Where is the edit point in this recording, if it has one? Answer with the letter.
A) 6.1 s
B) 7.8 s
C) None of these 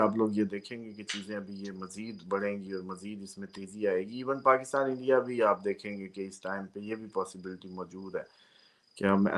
C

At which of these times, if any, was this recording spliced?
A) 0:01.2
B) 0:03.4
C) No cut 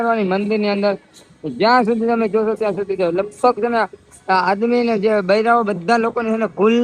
C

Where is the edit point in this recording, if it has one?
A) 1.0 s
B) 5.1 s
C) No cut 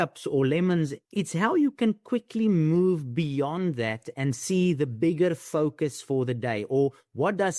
A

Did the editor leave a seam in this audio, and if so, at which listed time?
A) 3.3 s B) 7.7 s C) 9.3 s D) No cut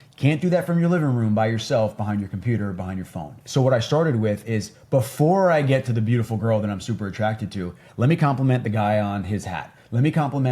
A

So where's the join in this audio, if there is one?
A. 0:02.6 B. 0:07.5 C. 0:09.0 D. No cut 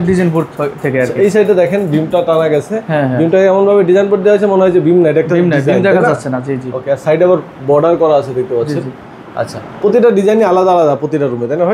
D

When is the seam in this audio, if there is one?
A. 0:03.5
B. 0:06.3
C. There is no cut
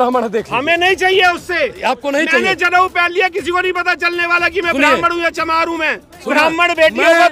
B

